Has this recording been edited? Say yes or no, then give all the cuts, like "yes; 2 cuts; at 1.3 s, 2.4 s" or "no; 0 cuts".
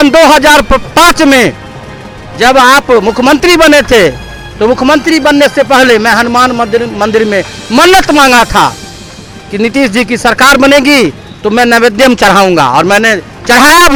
no; 0 cuts